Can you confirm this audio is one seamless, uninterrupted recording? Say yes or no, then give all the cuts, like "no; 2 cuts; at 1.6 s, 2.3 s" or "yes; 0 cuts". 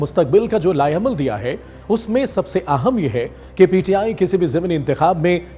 yes; 0 cuts